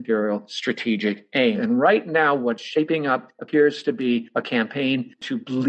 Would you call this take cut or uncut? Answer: cut